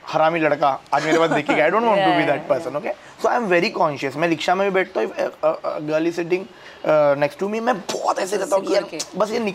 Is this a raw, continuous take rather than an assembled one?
yes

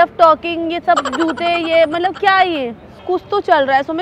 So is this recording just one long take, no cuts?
no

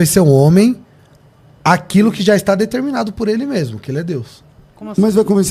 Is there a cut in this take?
no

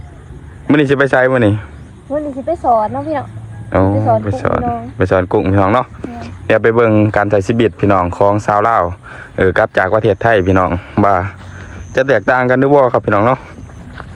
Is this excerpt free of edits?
yes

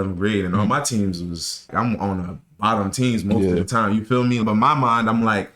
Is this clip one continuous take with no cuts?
no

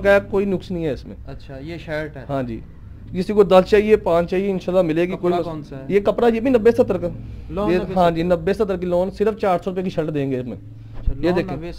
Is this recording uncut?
yes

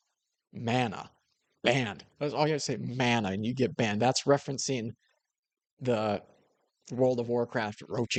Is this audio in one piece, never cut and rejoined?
yes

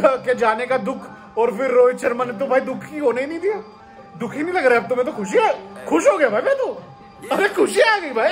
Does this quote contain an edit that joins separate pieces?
no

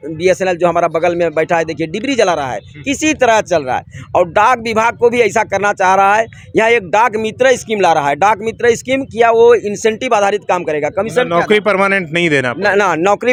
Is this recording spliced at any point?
no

